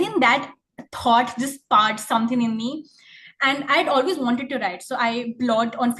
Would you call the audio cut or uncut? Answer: uncut